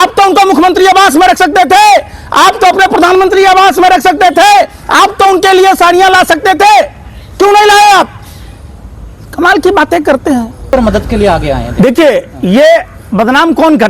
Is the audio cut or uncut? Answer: uncut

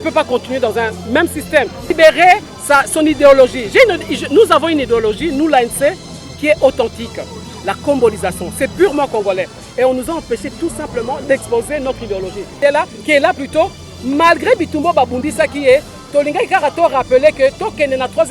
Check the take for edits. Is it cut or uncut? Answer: cut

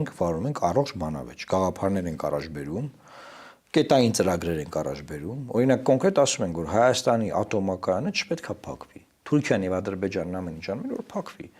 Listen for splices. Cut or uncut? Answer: uncut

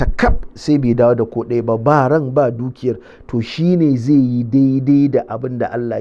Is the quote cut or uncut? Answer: uncut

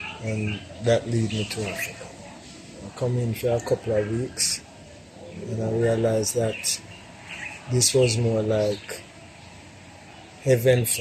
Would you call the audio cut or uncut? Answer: uncut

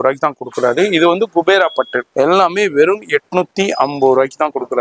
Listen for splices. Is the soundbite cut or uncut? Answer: cut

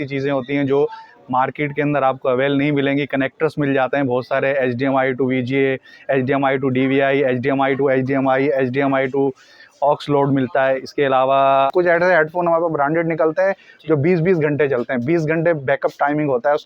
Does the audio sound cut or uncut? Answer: cut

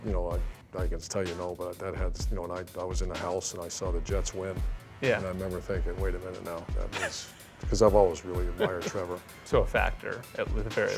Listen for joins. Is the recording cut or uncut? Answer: cut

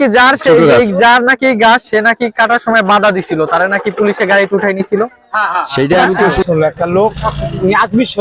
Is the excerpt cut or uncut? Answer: cut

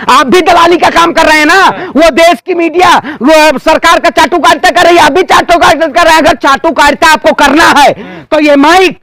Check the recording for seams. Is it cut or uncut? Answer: uncut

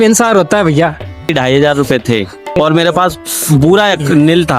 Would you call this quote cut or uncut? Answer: cut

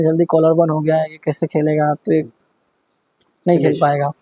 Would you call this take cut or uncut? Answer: uncut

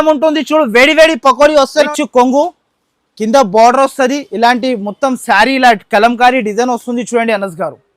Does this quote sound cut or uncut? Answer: cut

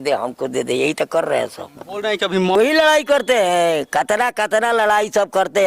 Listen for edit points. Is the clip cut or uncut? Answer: cut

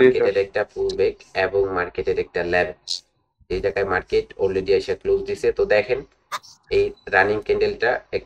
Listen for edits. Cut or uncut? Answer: uncut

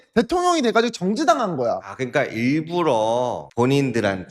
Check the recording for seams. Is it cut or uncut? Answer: cut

